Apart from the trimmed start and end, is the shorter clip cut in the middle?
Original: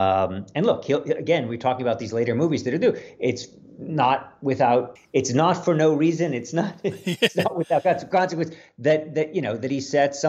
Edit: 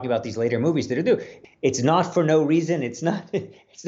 yes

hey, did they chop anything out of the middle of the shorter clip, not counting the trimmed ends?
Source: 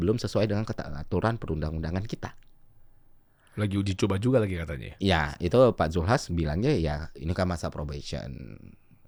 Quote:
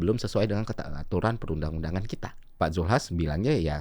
yes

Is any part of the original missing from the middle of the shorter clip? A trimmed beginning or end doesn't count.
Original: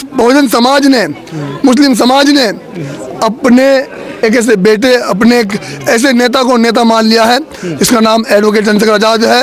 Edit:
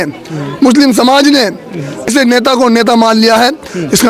yes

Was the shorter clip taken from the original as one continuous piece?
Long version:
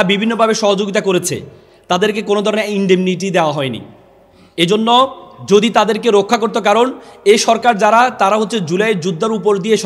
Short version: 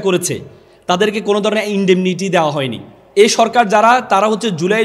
no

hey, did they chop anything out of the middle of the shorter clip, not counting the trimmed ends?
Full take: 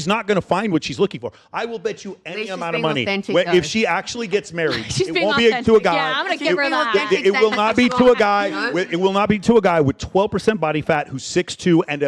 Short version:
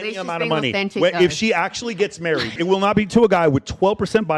yes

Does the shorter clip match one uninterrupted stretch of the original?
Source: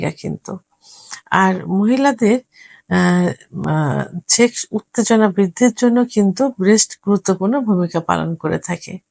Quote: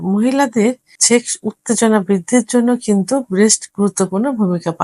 no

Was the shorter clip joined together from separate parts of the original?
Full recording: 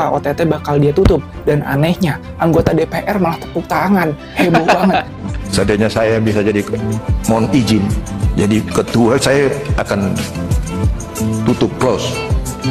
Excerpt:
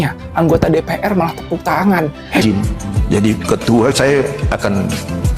yes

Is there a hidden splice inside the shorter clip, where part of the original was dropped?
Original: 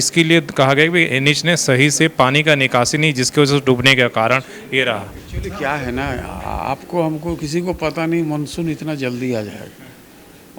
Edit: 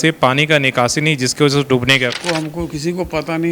yes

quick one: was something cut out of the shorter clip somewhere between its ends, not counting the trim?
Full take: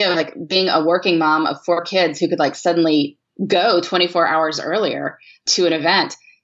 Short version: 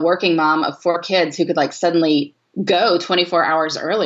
no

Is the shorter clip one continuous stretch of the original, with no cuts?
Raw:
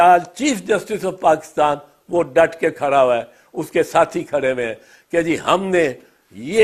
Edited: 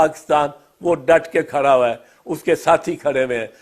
yes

